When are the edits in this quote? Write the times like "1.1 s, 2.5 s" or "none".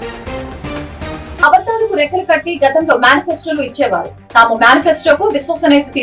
none